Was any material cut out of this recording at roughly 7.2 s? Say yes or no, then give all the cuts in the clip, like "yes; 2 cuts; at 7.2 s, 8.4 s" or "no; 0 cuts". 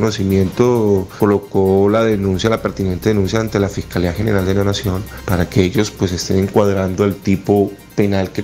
no; 2 cuts; at 1.1 s, 5.1 s